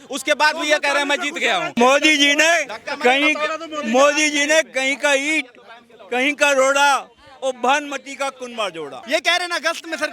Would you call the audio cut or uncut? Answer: cut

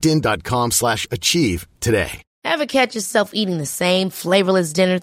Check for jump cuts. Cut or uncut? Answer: cut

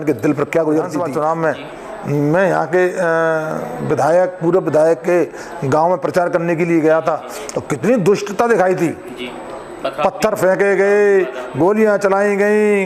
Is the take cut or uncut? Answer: cut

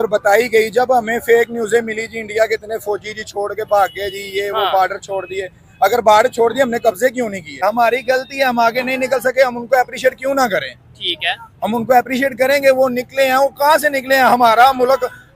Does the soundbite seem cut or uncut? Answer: cut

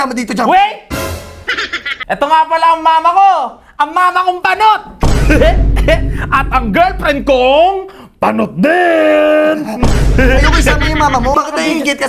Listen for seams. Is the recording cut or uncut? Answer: cut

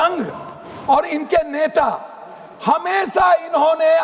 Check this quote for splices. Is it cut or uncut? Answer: uncut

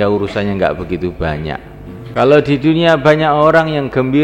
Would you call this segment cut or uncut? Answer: cut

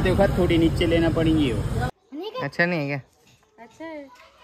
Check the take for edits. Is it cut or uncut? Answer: cut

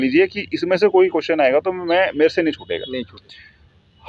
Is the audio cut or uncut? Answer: cut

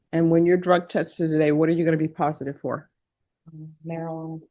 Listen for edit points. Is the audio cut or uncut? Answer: uncut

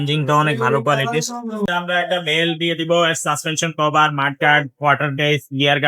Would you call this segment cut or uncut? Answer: cut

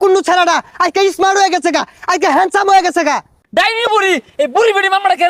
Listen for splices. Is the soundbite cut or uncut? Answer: cut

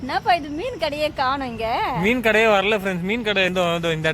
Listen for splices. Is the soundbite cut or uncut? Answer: uncut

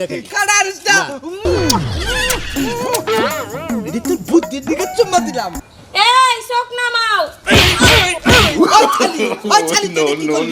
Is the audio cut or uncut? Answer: cut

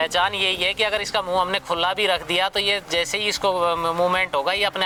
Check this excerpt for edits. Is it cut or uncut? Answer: uncut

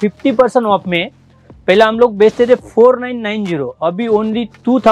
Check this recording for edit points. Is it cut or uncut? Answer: uncut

